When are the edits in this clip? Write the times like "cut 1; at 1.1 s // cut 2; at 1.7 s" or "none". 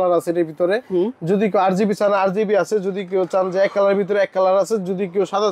none